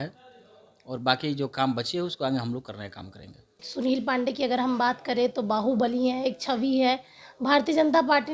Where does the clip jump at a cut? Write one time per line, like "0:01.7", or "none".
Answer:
0:03.6